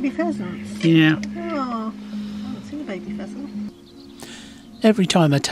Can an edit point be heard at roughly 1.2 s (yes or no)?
no